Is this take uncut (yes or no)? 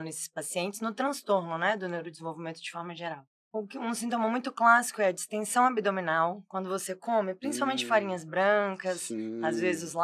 no